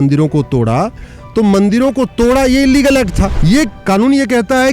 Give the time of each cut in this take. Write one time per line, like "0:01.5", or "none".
0:03.3